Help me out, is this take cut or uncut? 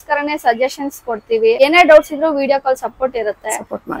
cut